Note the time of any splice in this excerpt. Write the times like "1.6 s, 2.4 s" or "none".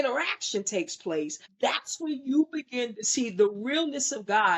1.4 s